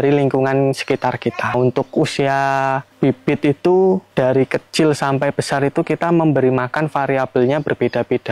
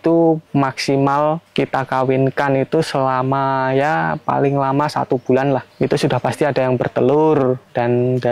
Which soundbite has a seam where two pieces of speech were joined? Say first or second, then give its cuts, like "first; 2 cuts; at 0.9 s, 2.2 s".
first; 1 cut; at 1.5 s